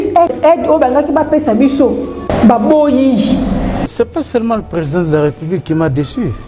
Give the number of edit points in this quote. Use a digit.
2